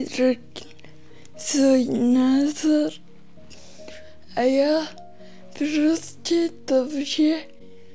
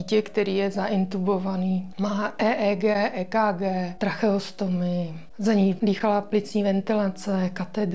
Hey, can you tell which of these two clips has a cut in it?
second; 4 cuts; at 1.9 s, 3.9 s, 5.2 s, 5.8 s

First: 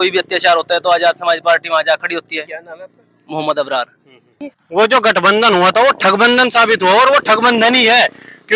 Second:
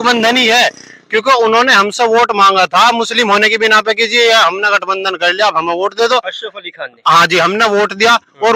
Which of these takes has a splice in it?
first; 1 cut; at 4.6 s

